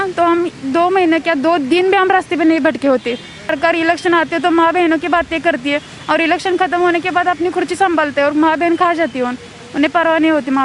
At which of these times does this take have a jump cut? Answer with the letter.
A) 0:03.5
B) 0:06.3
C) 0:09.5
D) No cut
A